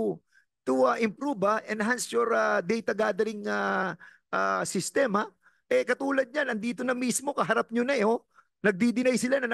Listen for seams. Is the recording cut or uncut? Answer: uncut